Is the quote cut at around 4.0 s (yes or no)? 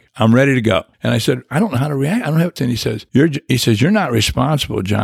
no